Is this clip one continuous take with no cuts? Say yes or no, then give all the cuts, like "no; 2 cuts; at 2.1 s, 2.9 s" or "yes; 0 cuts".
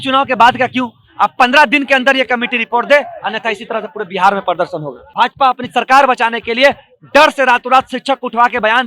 no; 1 cut; at 5.0 s